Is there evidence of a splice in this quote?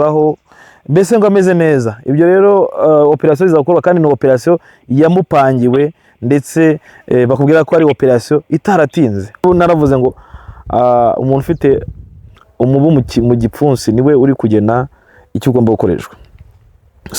yes; 1 cut; at 9.4 s

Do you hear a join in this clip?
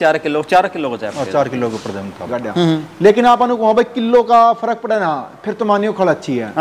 yes; 1 cut; at 2.4 s

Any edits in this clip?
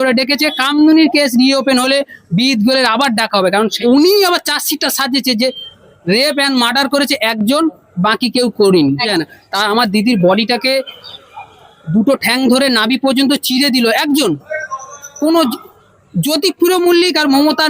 yes; 2 cuts; at 3.8 s, 9.1 s

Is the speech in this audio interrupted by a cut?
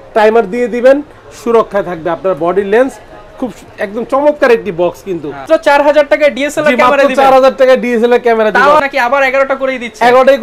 yes; 2 cuts; at 5.4 s, 8.8 s

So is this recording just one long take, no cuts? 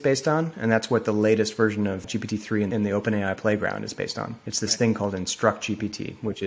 no; 2 cuts; at 2.5 s, 4.4 s

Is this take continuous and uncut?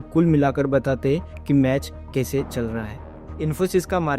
no; 1 cut; at 3.2 s

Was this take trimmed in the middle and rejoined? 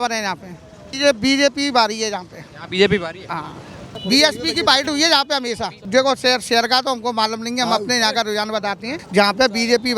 yes; 4 cuts; at 0.9 s, 3.9 s, 5.8 s, 8.9 s

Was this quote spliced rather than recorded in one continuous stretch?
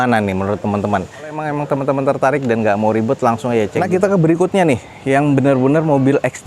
yes; 2 cuts; at 1.4 s, 3.7 s

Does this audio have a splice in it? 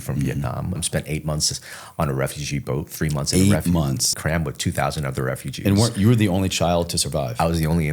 yes; 2 cuts; at 0.8 s, 4.1 s

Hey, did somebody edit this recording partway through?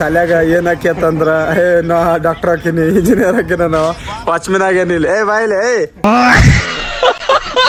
no; 0 cuts

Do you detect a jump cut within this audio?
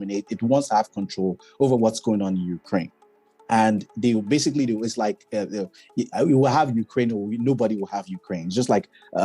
no; 0 cuts

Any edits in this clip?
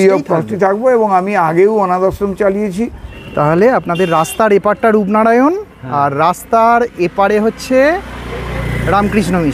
yes; 1 cut; at 3.1 s

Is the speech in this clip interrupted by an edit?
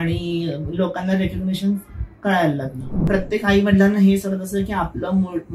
yes; 1 cut; at 3.1 s

